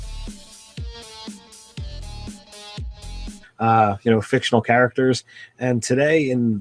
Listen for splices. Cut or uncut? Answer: uncut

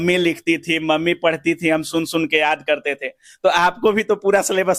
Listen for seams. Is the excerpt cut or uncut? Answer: uncut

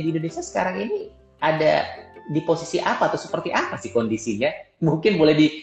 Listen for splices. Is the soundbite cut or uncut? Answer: uncut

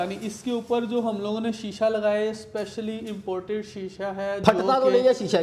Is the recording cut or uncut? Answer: uncut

